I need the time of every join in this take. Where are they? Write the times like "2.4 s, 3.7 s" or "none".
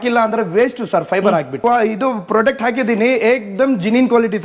1.5 s